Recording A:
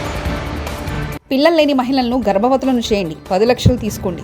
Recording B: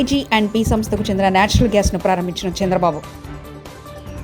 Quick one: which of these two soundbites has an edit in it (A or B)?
A